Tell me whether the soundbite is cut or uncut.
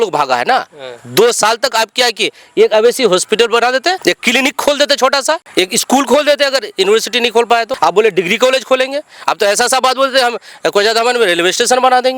cut